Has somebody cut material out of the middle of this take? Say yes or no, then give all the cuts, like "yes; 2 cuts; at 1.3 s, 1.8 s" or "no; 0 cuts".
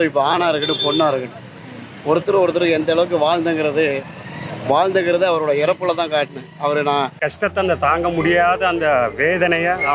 yes; 1 cut; at 7.2 s